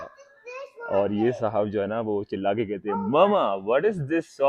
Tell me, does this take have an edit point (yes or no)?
no